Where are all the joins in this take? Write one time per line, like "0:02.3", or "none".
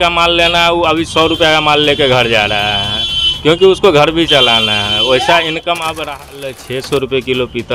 0:06.6